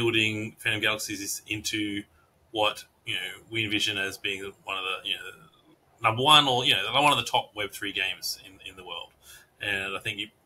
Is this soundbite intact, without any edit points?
yes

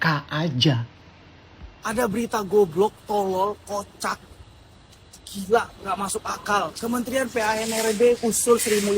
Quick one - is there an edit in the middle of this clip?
yes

